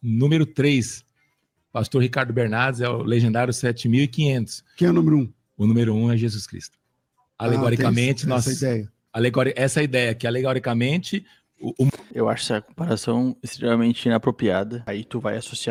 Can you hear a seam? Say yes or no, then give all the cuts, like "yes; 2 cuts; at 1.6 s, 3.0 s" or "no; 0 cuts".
no; 0 cuts